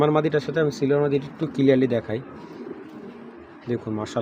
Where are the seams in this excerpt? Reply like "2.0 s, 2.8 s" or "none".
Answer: none